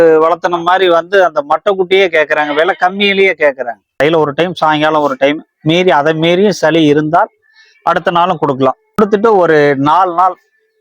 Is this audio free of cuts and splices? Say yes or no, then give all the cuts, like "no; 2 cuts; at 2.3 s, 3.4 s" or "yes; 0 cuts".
no; 2 cuts; at 4.0 s, 9.0 s